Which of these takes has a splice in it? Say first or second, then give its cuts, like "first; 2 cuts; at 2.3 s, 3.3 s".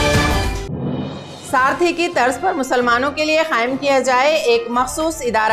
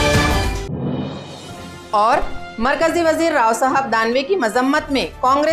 second; 1 cut; at 1.3 s